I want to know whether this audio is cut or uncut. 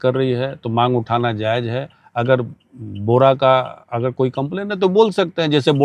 uncut